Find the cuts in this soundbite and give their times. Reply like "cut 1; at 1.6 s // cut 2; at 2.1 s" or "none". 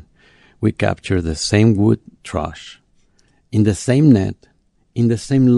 cut 1; at 2.2 s